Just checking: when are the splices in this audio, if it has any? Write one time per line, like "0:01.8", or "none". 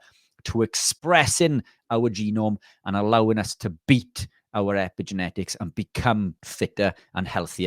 0:06.4